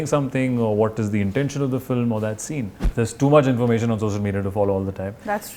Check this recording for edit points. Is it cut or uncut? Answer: cut